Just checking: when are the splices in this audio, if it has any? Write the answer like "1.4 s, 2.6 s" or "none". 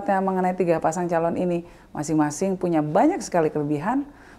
none